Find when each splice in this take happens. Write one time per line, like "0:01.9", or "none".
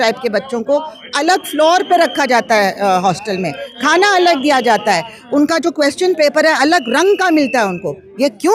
none